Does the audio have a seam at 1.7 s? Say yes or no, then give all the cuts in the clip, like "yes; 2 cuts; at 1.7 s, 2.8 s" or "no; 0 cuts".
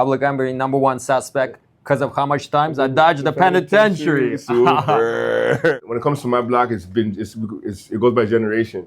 no; 1 cut; at 5.8 s